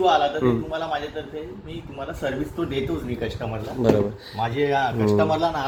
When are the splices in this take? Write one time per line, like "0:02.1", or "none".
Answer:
none